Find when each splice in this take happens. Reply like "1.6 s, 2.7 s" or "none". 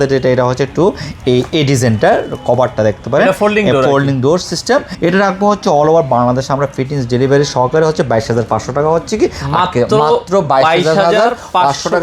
4.9 s